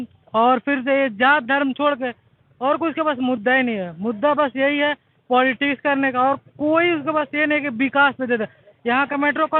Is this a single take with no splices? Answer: yes; 0 cuts

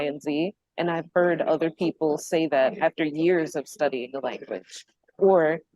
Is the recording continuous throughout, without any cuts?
yes; 0 cuts

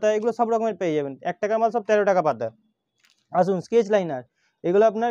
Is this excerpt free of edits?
yes; 0 cuts

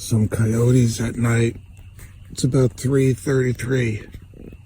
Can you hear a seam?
no; 0 cuts

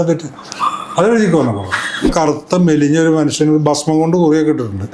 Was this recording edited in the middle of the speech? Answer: yes; 1 cut; at 2.1 s

